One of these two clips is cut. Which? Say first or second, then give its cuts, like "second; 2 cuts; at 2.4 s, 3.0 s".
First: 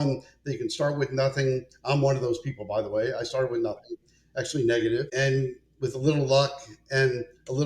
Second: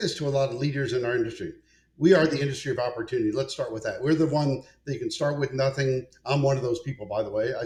first; 1 cut; at 5.1 s